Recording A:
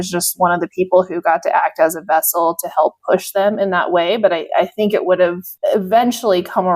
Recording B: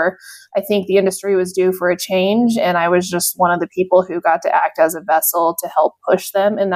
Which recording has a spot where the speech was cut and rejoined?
A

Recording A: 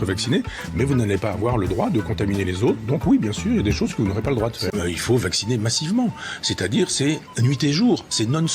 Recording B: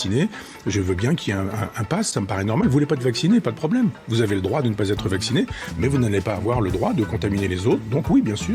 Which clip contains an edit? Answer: A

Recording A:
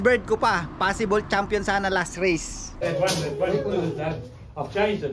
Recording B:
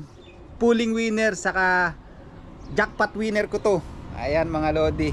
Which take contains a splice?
A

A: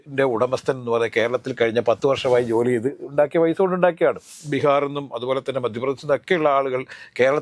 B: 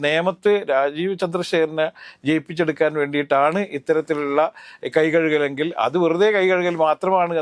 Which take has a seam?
A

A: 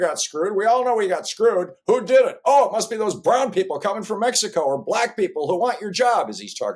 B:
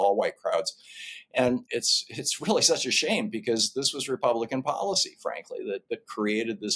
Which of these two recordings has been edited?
B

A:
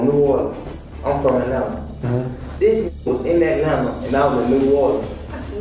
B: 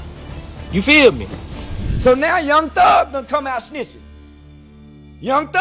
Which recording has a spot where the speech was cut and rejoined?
B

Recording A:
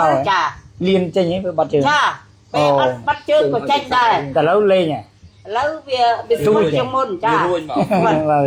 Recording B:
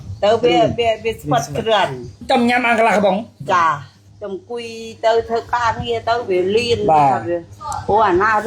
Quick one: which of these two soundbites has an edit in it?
B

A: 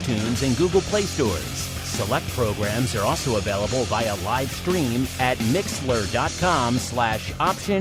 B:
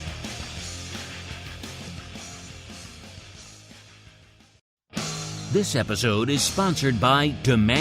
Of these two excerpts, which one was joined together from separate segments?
B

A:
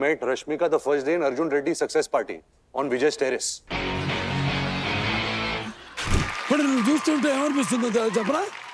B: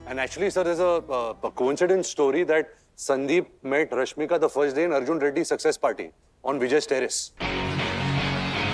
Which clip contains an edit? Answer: A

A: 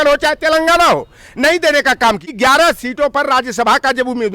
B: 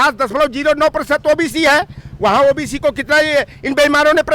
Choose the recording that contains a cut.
A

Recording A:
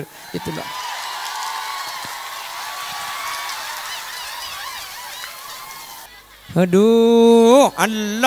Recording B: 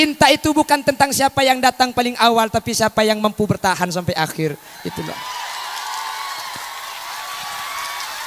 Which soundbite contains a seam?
A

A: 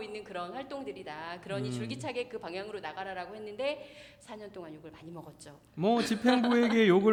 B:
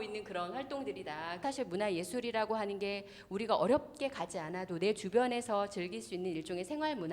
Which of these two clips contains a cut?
B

